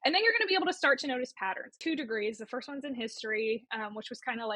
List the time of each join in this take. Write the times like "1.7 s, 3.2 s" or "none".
1.7 s

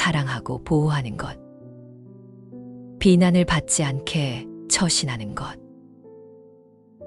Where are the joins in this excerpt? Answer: 1.3 s, 3.0 s

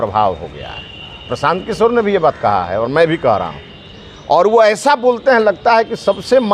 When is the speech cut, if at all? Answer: none

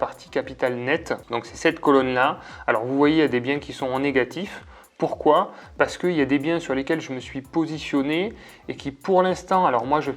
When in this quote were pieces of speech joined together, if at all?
none

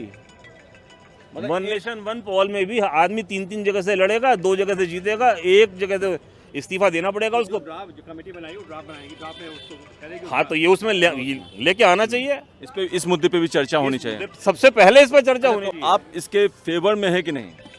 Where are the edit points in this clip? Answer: none

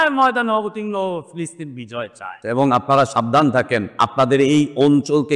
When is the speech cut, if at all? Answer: 2.4 s, 3.9 s

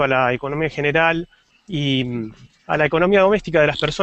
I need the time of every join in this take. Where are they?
2.9 s

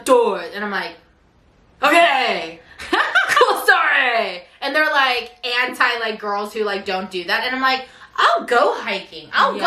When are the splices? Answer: none

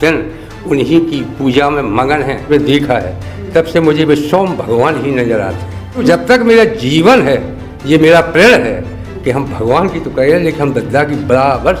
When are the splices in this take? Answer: 2.4 s, 6.0 s

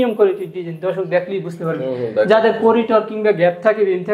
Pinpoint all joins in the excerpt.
none

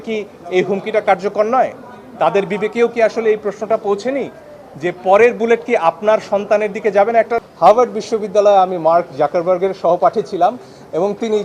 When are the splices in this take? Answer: 7.5 s

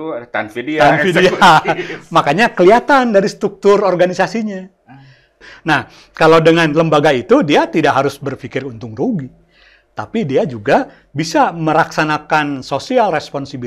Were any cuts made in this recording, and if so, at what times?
5.5 s

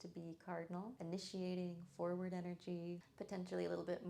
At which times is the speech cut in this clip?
1.0 s, 3.1 s

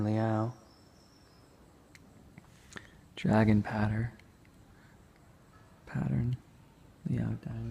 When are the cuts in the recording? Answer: none

